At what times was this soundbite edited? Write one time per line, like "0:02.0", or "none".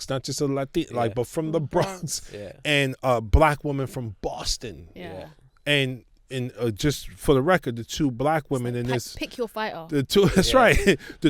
none